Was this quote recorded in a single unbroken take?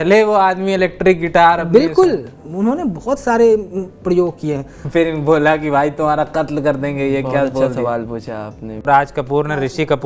no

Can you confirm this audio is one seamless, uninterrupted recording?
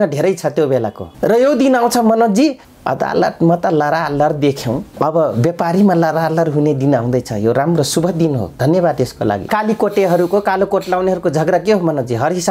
no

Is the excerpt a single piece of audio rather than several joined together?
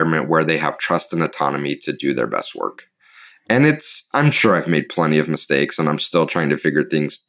yes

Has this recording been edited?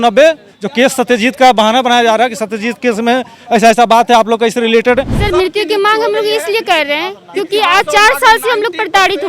yes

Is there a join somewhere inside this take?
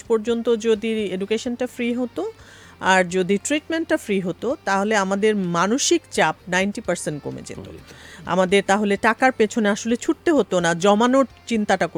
no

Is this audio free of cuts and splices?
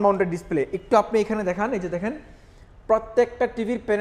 yes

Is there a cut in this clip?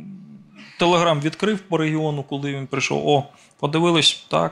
no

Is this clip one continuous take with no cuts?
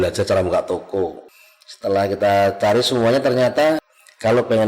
no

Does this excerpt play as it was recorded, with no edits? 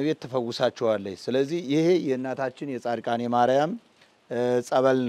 yes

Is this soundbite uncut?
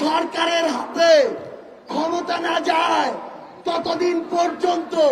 yes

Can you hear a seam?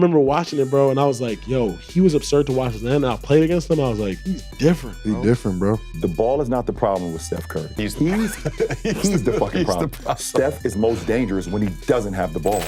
yes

